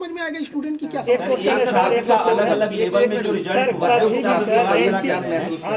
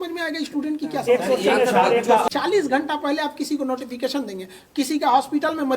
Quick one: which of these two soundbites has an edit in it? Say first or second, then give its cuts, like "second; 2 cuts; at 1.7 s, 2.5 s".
second; 1 cut; at 2.2 s